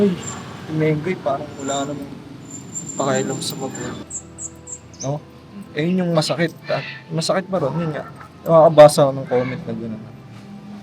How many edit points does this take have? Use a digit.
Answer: 1